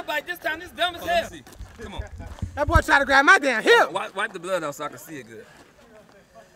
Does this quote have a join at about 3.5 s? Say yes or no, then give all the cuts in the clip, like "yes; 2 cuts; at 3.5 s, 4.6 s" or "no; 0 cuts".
no; 1 cut; at 1.9 s